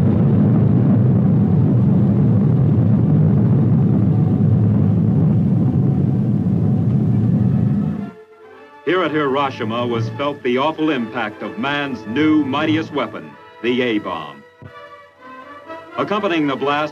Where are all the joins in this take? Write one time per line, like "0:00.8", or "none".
0:08.2

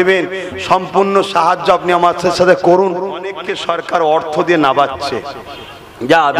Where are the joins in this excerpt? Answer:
0:03.5

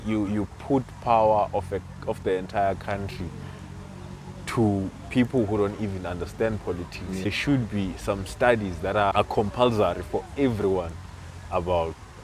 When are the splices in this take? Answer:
0:07.2
0:09.1

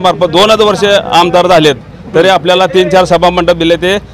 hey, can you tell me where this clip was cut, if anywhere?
none

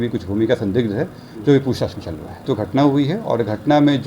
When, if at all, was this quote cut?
0:02.4

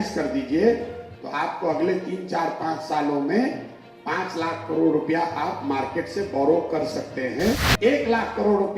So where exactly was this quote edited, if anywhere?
0:07.7

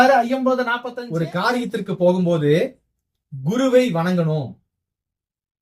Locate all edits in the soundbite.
0:00.9

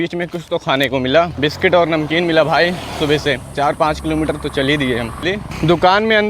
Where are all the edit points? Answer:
0:05.2

